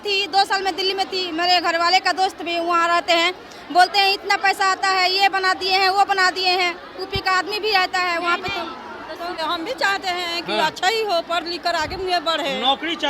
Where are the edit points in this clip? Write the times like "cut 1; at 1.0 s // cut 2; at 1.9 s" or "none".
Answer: cut 1; at 9.4 s